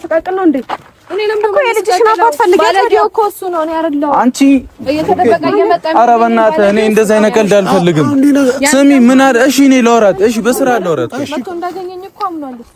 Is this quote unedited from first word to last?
yes; 0 cuts

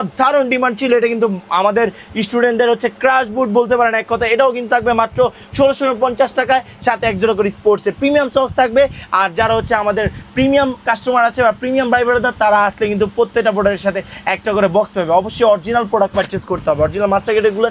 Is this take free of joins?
yes; 0 cuts

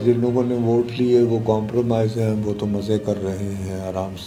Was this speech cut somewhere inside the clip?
no; 0 cuts

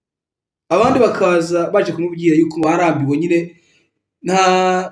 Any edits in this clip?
yes; 1 cut; at 2.6 s

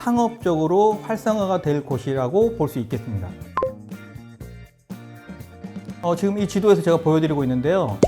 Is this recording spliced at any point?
no; 0 cuts

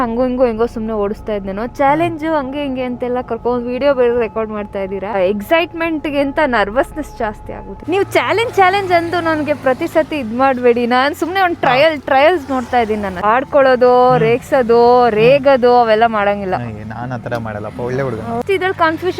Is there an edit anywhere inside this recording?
yes; 4 cuts; at 5.1 s, 7.7 s, 13.2 s, 18.4 s

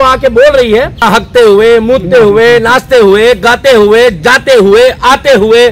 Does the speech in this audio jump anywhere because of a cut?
yes; 1 cut; at 1.0 s

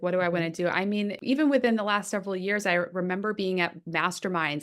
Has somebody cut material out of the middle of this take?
yes; 1 cut; at 1.2 s

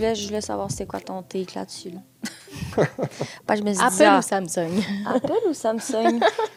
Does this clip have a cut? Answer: no; 0 cuts

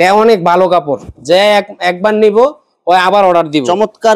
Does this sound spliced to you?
no; 0 cuts

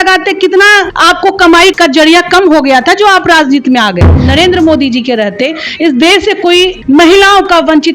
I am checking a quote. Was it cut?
yes; 4 cuts; at 0.9 s, 1.7 s, 4.2 s, 6.8 s

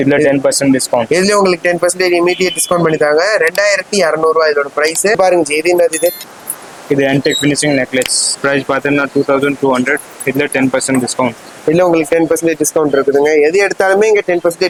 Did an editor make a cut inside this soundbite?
no; 0 cuts

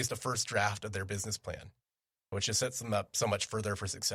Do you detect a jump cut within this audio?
no; 0 cuts

